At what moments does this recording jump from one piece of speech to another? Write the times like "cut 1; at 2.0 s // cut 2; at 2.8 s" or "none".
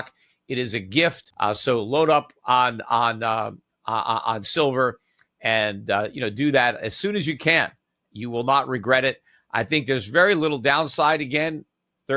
cut 1; at 1.3 s